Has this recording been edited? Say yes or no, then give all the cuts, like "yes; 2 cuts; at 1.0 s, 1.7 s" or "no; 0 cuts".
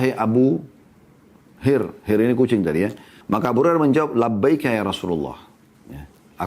yes; 1 cut; at 3.1 s